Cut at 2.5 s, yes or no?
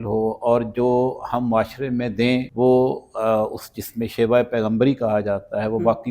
yes